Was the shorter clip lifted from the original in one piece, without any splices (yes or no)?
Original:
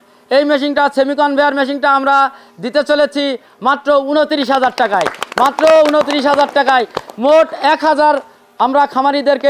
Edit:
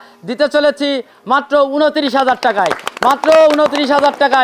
yes